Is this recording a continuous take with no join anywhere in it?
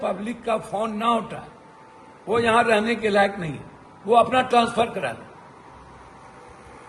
yes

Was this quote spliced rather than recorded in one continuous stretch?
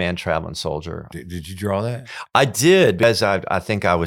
yes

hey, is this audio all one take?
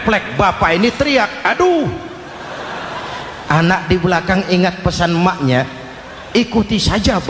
yes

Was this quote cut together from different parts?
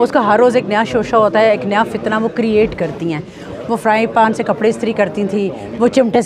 yes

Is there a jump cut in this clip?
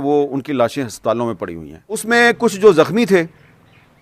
yes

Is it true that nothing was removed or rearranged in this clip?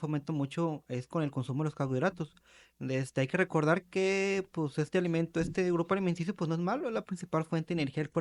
yes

